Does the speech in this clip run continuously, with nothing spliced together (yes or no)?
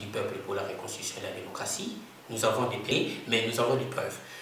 no